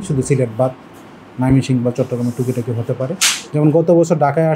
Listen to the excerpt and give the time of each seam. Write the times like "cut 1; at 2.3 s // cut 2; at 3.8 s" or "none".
cut 1; at 3.3 s